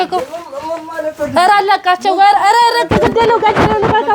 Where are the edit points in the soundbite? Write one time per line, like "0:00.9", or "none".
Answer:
none